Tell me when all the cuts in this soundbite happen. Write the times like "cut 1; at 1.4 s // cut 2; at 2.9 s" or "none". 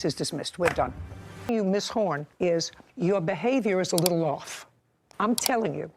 cut 1; at 1.5 s